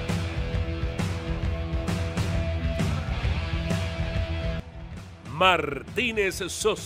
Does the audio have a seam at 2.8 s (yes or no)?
no